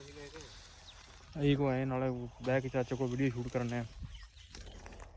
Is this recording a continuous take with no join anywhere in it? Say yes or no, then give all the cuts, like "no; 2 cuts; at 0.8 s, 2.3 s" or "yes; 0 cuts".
yes; 0 cuts